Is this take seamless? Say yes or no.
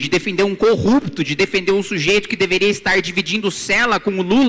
yes